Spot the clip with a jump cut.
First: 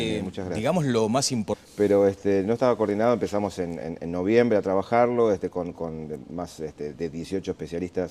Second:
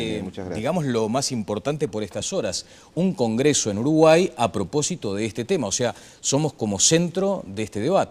second; 1 cut; at 1.6 s

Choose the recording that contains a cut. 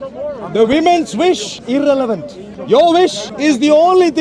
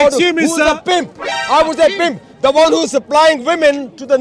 first; 3 cuts; at 1.5 s, 2.5 s, 3.3 s

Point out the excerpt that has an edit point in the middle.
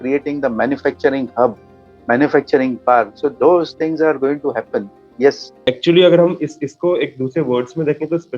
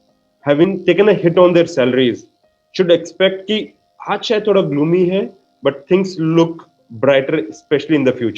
first; 1 cut; at 5.6 s

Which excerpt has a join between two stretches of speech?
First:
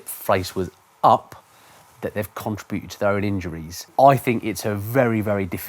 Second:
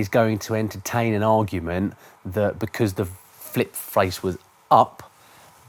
first; 1 cut; at 3.9 s

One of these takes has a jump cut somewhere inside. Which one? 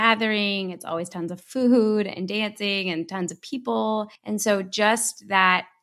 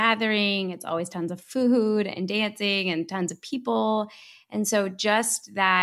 first; 1 cut; at 4.2 s

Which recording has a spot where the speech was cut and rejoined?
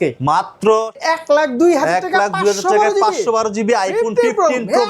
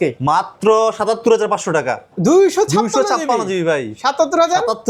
first; 1 cut; at 1.0 s

